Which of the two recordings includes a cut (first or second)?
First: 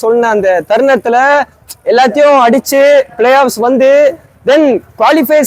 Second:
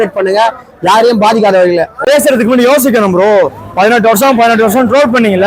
second